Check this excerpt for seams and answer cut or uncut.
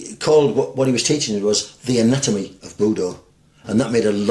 uncut